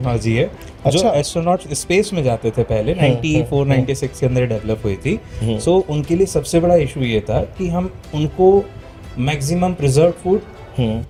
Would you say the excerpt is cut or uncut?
uncut